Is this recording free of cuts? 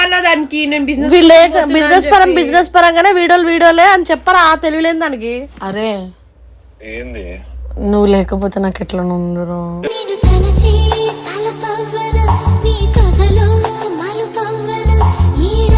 yes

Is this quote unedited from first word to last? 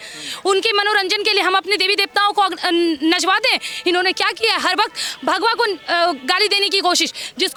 yes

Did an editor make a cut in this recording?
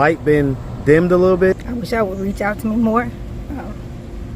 yes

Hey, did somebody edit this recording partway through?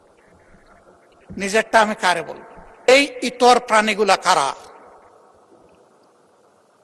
yes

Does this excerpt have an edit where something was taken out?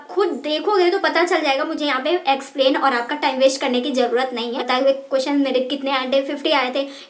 yes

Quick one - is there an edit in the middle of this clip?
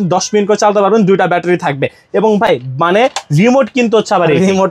no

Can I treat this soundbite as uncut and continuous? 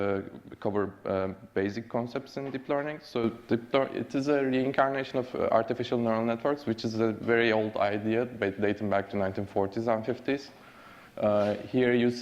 no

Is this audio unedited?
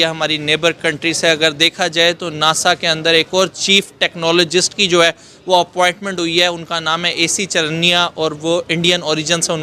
yes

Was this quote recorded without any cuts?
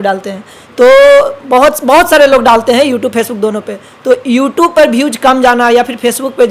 yes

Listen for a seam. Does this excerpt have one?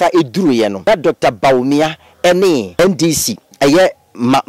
yes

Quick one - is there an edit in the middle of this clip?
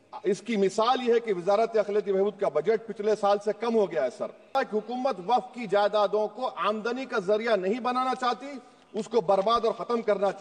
yes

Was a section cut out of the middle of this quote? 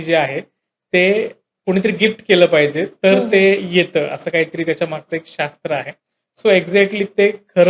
no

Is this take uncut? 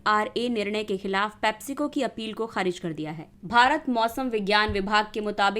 no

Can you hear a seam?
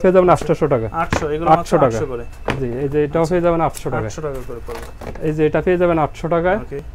no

